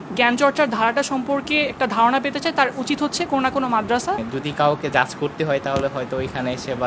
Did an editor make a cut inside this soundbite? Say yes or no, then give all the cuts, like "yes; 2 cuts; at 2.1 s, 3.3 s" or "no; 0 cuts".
yes; 1 cut; at 4.2 s